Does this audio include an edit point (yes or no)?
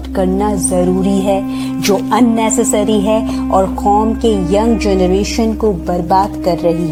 no